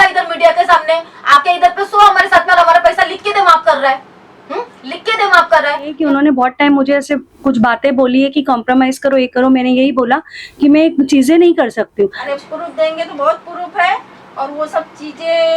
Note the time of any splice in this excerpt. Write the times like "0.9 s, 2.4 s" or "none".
6.0 s, 12.2 s